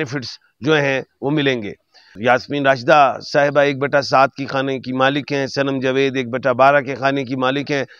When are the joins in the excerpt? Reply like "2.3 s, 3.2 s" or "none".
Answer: 2.1 s